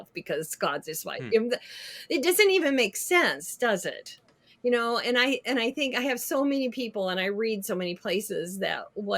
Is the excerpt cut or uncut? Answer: uncut